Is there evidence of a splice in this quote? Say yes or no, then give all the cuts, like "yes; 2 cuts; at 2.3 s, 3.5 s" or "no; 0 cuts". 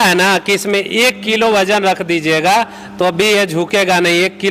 no; 0 cuts